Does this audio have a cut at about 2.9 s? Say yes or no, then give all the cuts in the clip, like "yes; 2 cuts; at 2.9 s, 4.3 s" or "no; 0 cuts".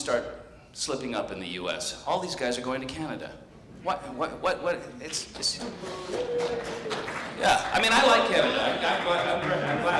yes; 1 cut; at 2.9 s